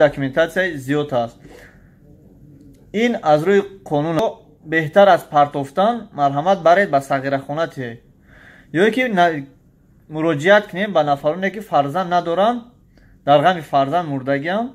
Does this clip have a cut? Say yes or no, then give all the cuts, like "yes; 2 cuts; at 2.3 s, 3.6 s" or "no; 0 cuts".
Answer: yes; 1 cut; at 4.2 s